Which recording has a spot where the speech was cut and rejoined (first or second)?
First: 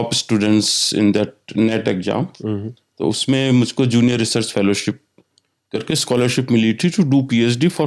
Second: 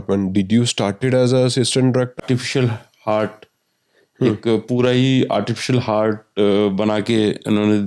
second